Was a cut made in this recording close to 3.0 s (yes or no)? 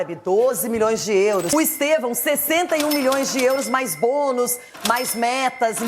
no